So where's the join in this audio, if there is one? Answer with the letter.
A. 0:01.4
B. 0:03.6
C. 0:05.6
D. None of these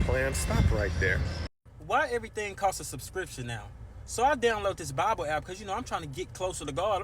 A